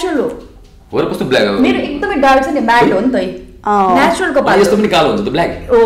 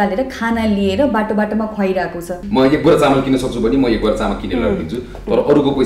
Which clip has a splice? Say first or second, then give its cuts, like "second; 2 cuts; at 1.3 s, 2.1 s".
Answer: second; 1 cut; at 2.3 s